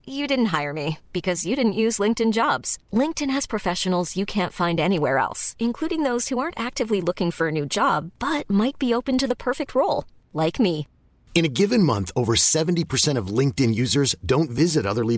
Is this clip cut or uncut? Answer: uncut